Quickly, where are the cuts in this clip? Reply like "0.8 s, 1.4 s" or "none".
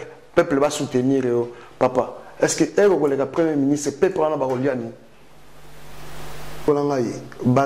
6.7 s